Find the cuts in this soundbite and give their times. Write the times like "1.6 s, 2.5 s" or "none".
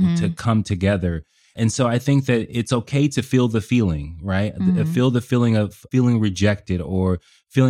1.5 s, 5.8 s